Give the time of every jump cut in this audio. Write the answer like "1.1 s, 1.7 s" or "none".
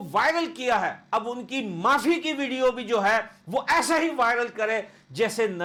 none